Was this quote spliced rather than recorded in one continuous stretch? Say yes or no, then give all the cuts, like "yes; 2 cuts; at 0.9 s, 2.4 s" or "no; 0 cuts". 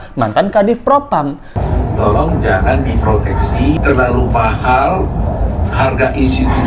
yes; 2 cuts; at 1.5 s, 3.8 s